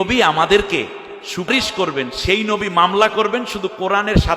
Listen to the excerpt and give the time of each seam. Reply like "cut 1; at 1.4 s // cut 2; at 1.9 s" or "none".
cut 1; at 1.5 s